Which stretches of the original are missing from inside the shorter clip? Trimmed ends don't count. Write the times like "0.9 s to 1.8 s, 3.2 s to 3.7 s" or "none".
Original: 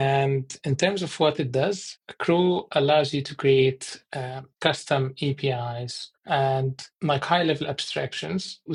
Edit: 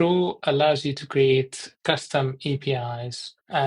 3.9 s to 4.4 s